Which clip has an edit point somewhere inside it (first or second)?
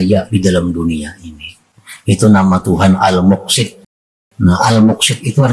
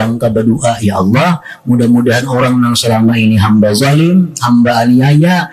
first